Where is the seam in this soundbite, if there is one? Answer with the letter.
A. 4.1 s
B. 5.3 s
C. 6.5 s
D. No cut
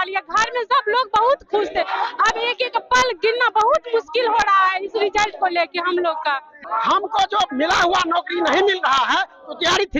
C